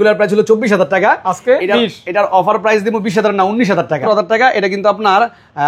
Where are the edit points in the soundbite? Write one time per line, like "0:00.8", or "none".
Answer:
0:04.0